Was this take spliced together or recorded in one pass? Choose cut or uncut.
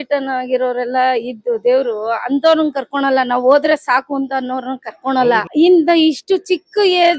cut